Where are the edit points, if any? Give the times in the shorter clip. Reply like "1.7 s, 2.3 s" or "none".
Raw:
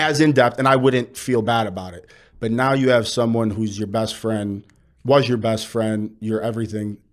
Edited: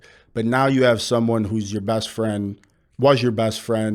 none

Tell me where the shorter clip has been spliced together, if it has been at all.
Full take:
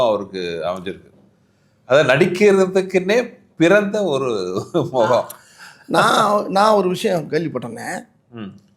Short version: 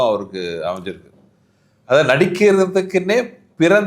none

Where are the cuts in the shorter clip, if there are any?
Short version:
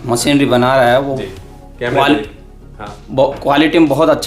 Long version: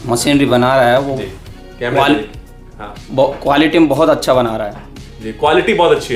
none

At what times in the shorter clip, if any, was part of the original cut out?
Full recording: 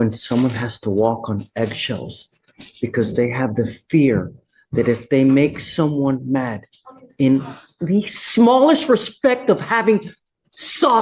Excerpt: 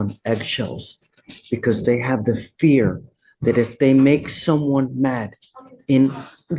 none

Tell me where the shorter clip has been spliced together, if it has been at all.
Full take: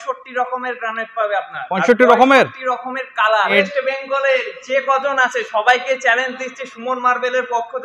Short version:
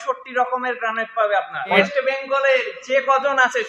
1.8 s

